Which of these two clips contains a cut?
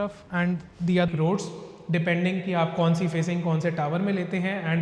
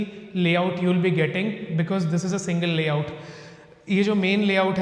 first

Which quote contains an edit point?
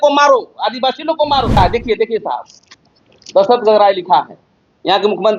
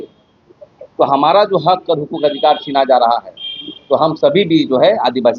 first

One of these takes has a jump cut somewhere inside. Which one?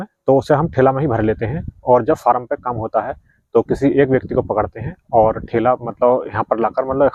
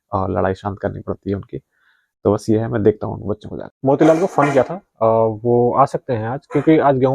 second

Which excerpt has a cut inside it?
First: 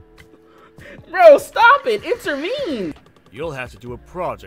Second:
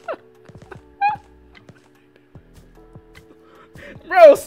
first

